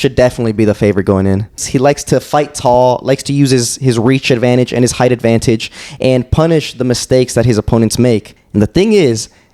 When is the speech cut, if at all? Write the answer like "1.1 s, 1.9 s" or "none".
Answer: 1.6 s, 8.4 s